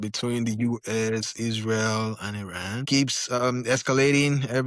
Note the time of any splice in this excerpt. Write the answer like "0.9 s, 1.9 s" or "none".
2.8 s